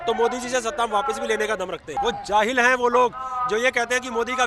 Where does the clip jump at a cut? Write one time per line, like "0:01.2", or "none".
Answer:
0:02.0